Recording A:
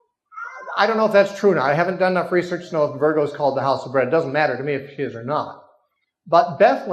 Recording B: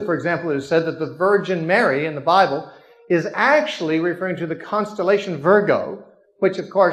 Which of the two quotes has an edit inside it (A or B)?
A